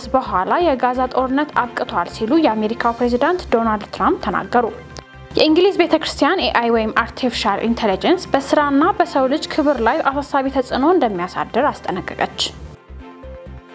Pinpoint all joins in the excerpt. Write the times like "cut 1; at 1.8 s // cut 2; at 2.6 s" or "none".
cut 1; at 12.4 s